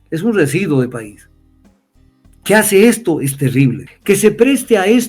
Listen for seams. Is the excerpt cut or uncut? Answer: cut